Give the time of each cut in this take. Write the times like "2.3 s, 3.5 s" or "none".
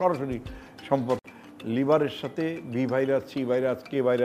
1.4 s